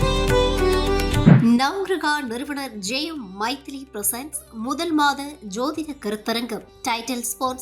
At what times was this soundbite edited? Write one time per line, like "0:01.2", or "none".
0:01.2